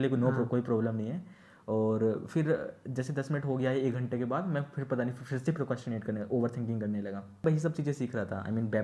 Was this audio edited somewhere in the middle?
yes; 1 cut; at 7.4 s

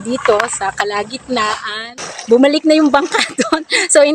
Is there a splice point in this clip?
yes; 1 cut; at 1.8 s

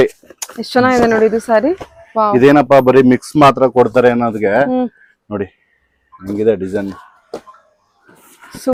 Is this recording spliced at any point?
no; 0 cuts

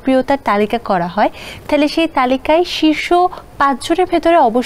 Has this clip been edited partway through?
no; 0 cuts

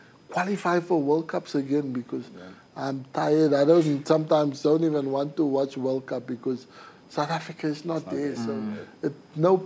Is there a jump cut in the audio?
no; 0 cuts

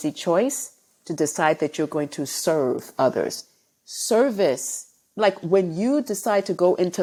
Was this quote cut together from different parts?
no; 0 cuts

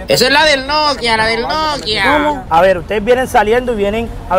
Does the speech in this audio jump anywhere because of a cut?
yes; 1 cut; at 2.4 s

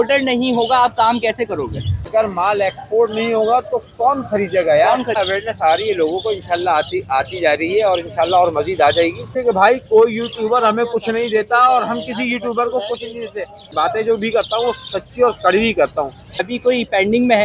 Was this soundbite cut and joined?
yes; 5 cuts; at 2.1 s, 5.2 s, 9.3 s, 13.7 s, 16.5 s

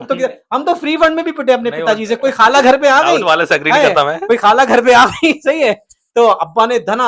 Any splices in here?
no; 0 cuts

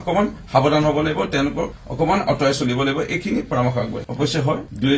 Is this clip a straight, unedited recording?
yes; 0 cuts

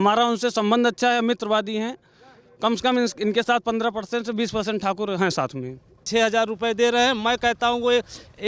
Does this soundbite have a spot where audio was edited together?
yes; 1 cut; at 6.0 s

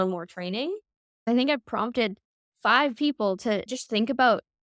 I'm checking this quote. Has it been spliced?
yes; 2 cuts; at 1.2 s, 3.7 s

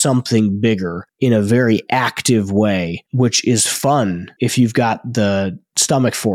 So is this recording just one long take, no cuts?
no; 2 cuts; at 3.0 s, 4.3 s

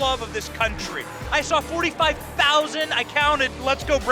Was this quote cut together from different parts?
no; 0 cuts

